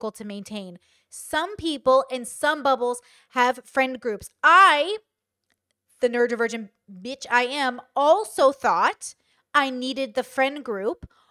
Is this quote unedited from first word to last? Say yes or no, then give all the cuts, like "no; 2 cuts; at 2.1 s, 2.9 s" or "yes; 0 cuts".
yes; 0 cuts